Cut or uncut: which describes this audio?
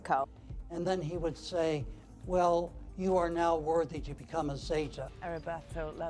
cut